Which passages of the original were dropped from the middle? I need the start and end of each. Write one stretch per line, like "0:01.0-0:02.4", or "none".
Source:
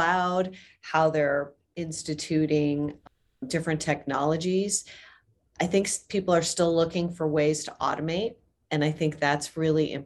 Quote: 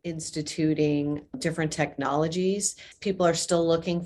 0:03.0-0:03.4
0:05.0-0:06.0